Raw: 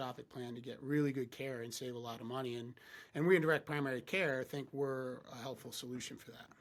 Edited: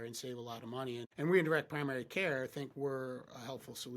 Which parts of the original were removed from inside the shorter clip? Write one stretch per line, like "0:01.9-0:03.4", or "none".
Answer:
0:02.7-0:03.1